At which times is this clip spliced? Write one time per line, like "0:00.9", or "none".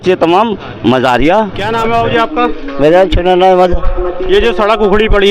none

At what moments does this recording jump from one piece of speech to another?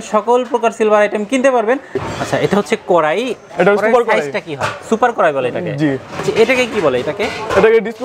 0:02.0
0:06.2

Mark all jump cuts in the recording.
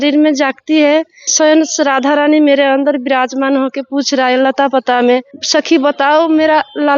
0:01.3
0:05.4

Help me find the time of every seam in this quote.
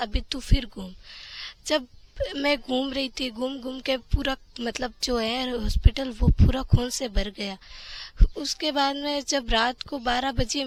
none

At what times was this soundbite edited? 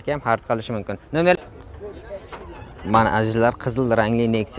0:01.3

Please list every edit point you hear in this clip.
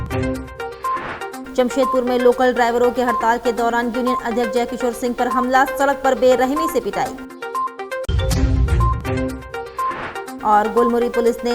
0:01.4

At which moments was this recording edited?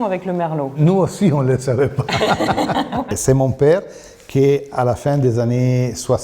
none

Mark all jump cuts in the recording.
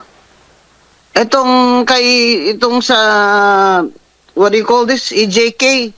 none

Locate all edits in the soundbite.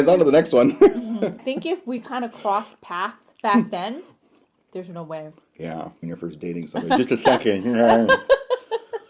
0:01.4
0:06.0

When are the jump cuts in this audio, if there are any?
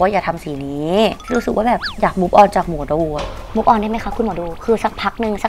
0:01.2

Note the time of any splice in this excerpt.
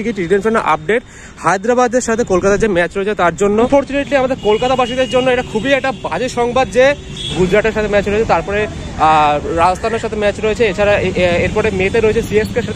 0:03.7
0:07.3

